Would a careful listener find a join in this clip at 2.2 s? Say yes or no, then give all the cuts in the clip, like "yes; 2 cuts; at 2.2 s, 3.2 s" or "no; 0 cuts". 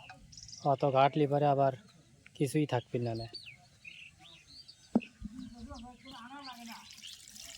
no; 1 cut; at 6.1 s